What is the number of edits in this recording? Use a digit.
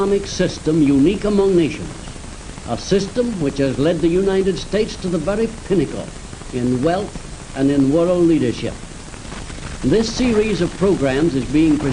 0